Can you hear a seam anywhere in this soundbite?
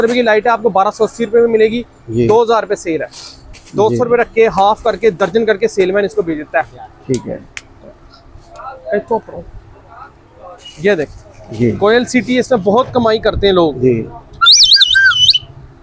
no; 0 cuts

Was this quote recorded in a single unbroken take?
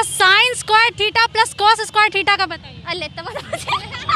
yes; 0 cuts

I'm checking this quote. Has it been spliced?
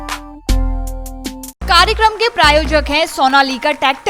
yes; 1 cut; at 1.6 s

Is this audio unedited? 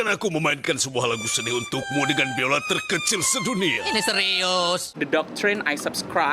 no; 1 cut; at 4.9 s

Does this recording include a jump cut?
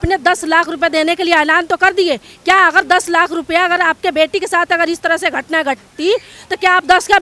no; 0 cuts

